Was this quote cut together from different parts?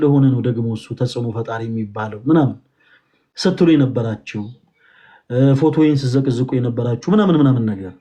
no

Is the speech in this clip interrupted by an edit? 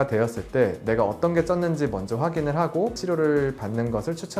no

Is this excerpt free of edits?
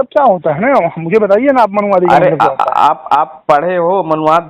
yes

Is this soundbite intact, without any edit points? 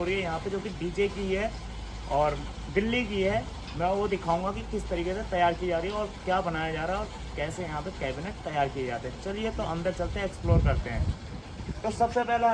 yes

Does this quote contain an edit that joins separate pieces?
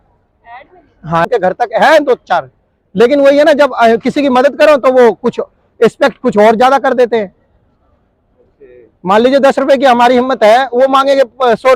yes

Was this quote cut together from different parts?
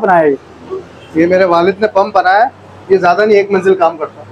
no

